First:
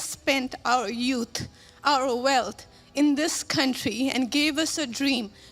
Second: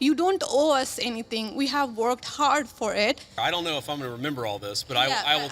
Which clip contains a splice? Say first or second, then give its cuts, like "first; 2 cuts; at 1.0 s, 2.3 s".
second; 1 cut; at 3.3 s